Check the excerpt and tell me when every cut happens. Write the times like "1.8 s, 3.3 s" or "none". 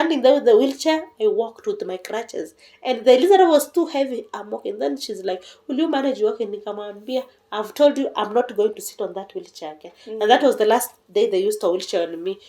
none